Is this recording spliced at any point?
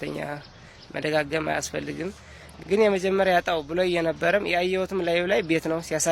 no; 0 cuts

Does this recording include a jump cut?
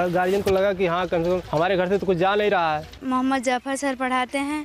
yes; 2 cuts; at 1.5 s, 2.9 s

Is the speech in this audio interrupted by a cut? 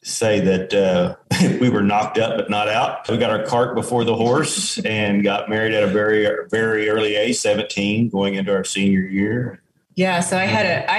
no; 0 cuts

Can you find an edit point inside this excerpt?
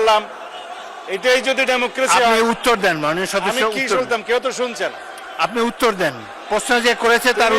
no; 0 cuts

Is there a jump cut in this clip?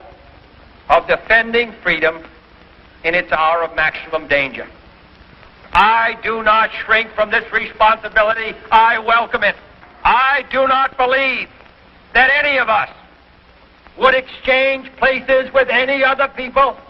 yes; 1 cut; at 6.0 s

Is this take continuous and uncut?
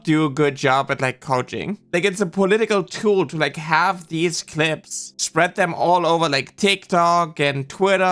no; 1 cut; at 1.8 s

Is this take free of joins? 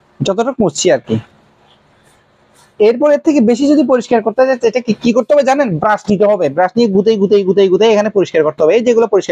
yes; 0 cuts

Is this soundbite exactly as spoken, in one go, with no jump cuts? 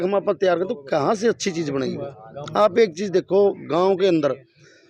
yes; 0 cuts

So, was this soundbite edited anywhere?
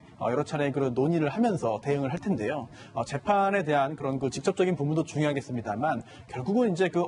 no; 0 cuts

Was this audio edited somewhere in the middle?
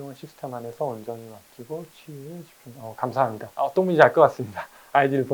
no; 0 cuts

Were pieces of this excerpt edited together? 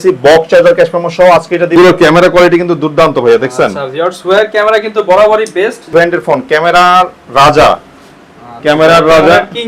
yes; 2 cuts; at 1.8 s, 5.9 s

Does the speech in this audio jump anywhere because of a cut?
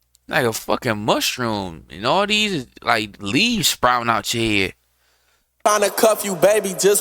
yes; 1 cut; at 5.6 s

